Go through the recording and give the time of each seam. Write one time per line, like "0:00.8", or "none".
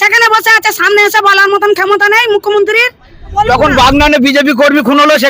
0:03.4